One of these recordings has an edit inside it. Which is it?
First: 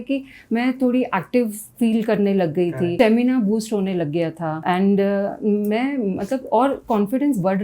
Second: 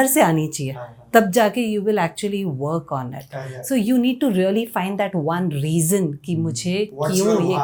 first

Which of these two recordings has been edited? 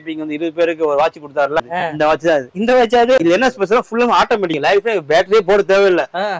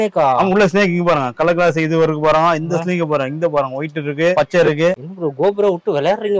first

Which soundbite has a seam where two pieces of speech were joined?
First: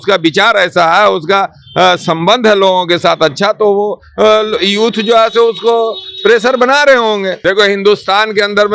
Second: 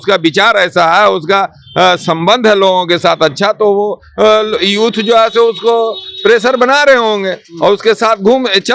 first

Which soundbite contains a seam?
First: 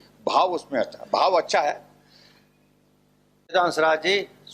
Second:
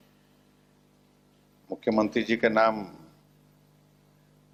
first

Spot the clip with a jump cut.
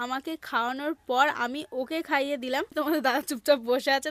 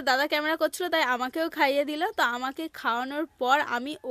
first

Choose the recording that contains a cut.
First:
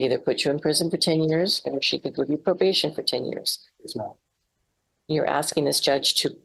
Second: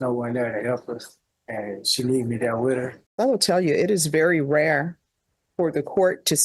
second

